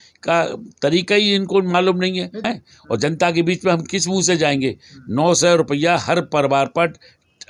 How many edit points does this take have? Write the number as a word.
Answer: one